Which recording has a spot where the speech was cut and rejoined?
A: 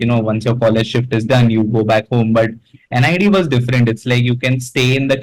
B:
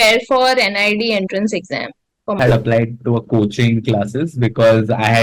B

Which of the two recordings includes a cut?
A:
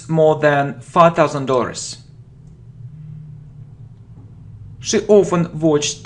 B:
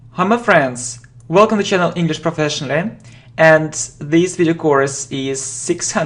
A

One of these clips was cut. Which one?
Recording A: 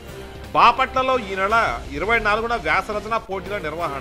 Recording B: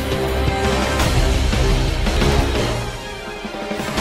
B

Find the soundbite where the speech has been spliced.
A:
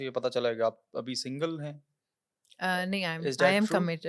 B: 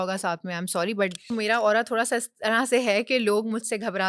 B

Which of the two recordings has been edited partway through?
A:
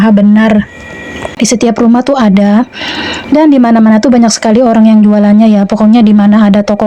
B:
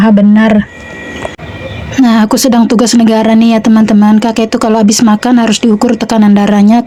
A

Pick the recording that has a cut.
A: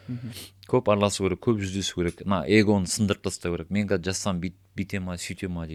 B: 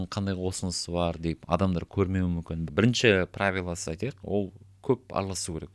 B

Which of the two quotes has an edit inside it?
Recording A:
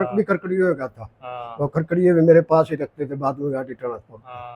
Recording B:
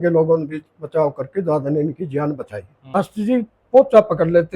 B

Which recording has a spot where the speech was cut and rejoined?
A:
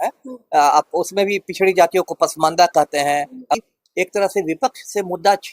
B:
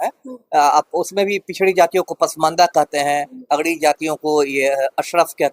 A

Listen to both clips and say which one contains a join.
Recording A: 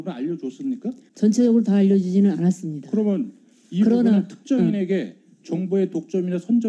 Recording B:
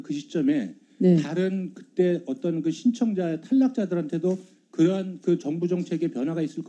A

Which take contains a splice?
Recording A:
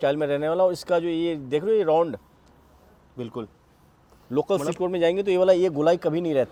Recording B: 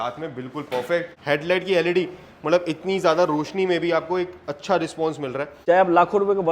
B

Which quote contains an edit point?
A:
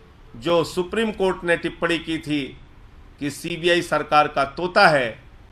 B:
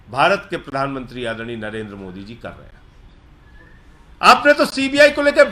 B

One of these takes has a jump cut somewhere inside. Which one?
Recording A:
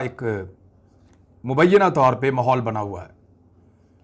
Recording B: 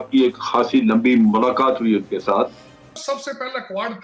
B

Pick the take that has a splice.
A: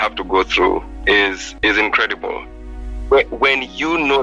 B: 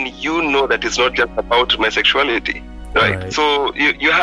A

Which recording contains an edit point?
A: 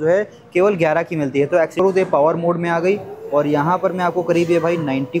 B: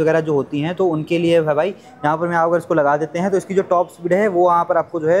A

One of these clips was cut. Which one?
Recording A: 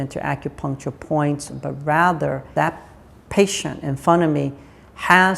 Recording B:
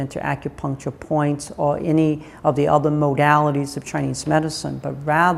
A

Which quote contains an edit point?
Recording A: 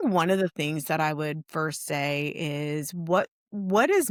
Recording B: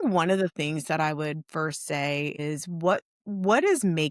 B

